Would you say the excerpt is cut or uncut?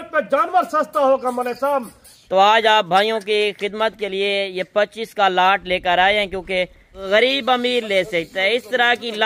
cut